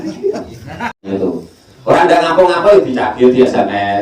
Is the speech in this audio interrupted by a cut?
yes; 1 cut; at 1.1 s

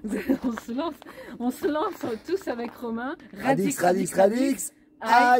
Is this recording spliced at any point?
yes; 1 cut; at 3.3 s

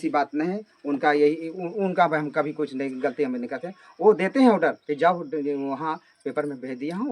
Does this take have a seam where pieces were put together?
no; 0 cuts

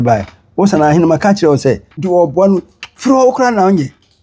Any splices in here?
yes; 1 cut; at 1.9 s

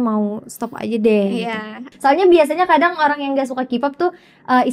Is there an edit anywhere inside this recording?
yes; 1 cut; at 1.9 s

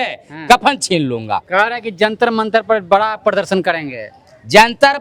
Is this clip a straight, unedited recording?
no; 1 cut; at 1.5 s

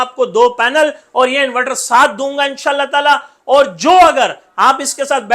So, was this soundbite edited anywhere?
no; 0 cuts

